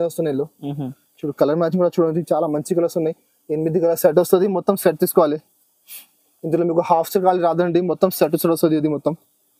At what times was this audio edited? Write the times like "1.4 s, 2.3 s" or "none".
none